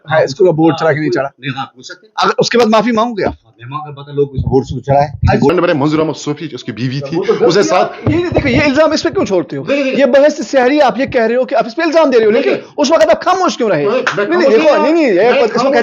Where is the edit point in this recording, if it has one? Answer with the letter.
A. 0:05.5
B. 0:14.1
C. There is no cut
A